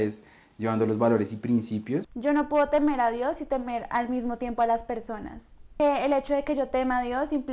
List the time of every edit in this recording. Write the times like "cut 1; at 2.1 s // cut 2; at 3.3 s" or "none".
cut 1; at 2.1 s // cut 2; at 5.7 s